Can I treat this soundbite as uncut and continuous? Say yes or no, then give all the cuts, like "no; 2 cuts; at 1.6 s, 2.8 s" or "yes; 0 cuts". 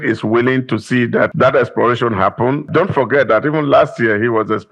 no; 2 cuts; at 1.3 s, 2.7 s